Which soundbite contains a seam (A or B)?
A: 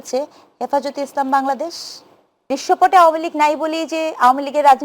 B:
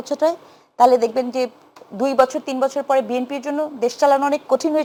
A